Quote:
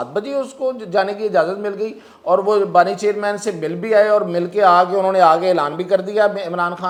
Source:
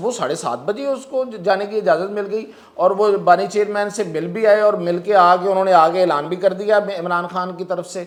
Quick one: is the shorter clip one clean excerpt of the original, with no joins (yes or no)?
yes